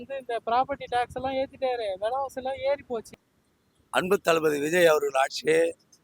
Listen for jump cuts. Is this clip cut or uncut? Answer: cut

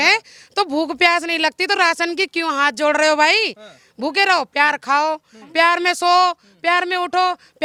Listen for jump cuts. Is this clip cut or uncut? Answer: uncut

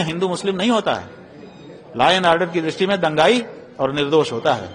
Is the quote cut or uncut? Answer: uncut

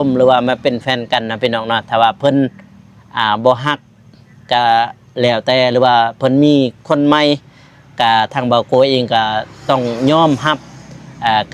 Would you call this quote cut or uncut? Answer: uncut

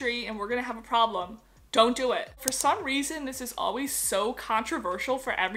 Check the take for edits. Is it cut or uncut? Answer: cut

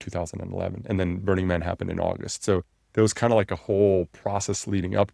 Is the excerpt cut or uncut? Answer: uncut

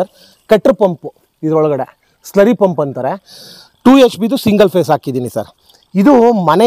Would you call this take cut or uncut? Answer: uncut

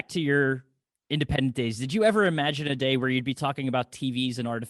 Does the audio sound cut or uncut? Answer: uncut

